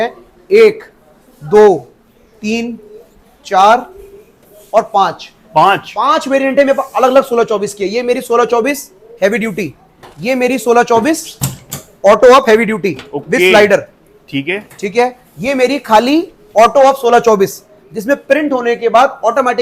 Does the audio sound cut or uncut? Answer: uncut